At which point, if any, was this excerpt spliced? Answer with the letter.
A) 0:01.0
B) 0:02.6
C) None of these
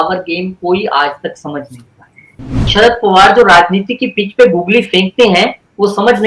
B